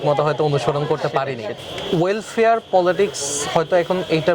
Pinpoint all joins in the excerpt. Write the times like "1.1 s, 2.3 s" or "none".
1.4 s